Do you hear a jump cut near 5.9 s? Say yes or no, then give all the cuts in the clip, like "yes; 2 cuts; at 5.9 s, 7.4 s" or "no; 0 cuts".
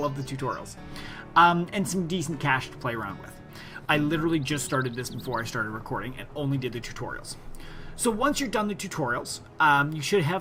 no; 0 cuts